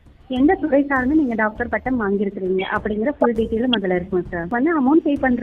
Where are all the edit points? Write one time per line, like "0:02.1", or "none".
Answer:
0:04.5